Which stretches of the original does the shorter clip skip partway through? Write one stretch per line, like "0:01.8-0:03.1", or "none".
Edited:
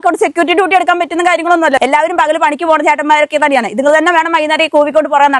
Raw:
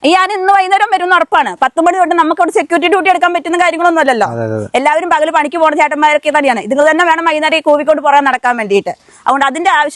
0:04.1-0:04.7